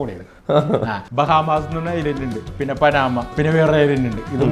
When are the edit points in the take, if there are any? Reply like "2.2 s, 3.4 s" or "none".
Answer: 1.0 s, 2.5 s, 3.3 s